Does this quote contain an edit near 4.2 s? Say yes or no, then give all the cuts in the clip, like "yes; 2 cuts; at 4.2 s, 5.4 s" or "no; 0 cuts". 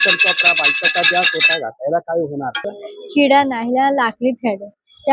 no; 1 cut; at 2.9 s